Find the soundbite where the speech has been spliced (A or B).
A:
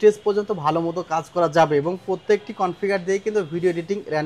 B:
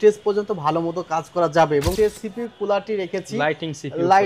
B